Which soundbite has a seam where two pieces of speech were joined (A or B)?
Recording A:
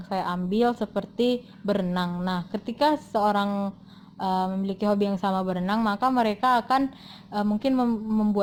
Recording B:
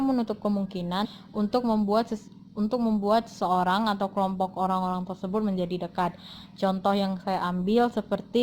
B